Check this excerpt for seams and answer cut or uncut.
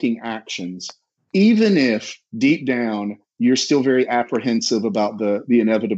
uncut